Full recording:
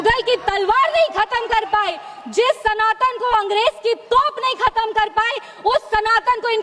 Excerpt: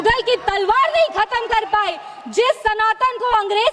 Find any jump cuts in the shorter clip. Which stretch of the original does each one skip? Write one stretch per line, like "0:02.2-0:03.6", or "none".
none